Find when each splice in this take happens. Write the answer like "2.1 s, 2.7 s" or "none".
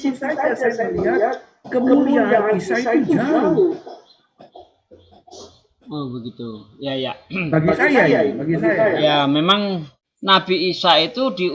9.9 s